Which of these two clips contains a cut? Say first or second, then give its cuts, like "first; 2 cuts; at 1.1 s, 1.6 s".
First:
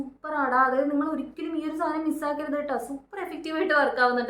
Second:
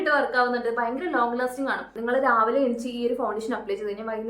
second; 1 cut; at 1.9 s